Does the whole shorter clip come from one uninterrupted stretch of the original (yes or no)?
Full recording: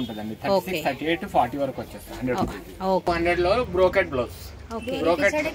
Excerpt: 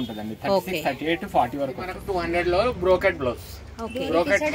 no